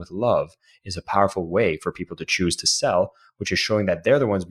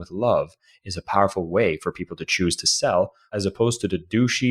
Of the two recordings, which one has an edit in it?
second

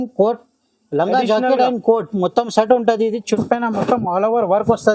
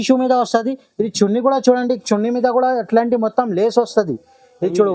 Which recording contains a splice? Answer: first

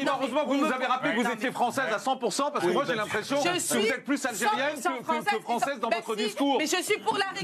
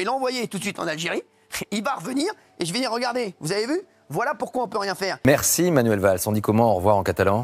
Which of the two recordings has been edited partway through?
second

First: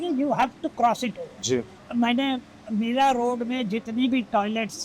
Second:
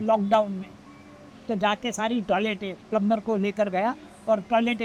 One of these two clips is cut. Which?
first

